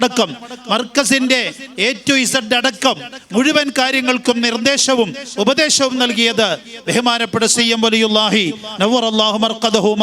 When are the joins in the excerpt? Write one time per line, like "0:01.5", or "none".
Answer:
none